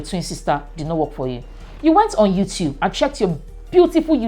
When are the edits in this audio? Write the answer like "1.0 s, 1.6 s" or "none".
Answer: none